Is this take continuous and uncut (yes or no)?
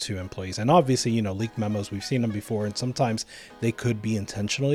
yes